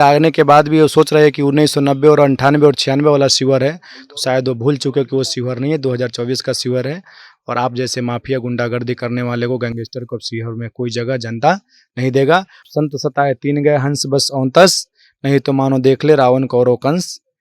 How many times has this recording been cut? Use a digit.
1